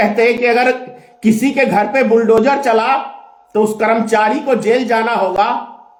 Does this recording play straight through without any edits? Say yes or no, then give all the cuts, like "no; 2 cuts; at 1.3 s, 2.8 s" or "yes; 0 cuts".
yes; 0 cuts